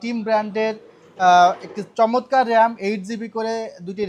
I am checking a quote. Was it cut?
no; 0 cuts

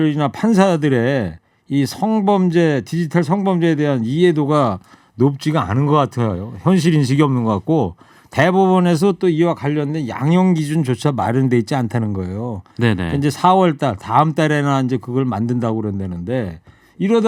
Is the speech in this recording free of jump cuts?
yes; 0 cuts

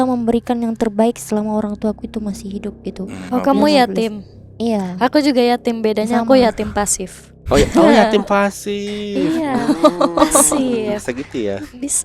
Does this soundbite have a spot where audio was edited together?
yes; 1 cut; at 3.2 s

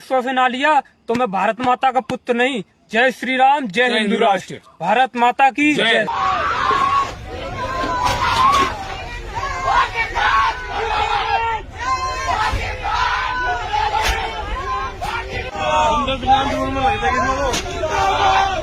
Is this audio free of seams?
yes; 0 cuts

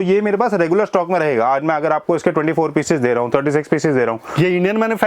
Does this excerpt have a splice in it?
no; 0 cuts

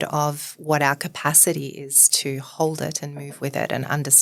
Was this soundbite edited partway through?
no; 0 cuts

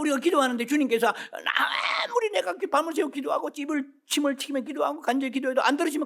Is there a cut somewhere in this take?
no; 0 cuts

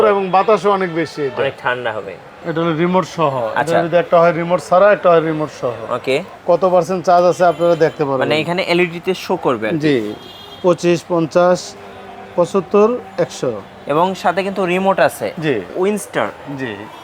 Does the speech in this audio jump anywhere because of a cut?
yes; 3 cuts; at 2.4 s, 6.3 s, 15.7 s

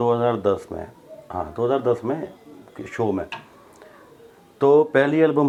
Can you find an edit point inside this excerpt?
no; 0 cuts

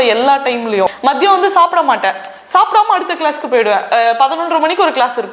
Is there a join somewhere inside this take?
yes; 1 cut; at 1.0 s

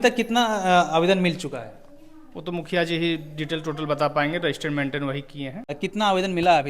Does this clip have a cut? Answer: yes; 1 cut; at 5.8 s

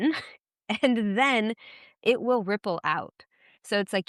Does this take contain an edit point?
no; 0 cuts

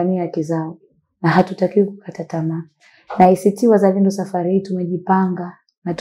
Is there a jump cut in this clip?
no; 0 cuts

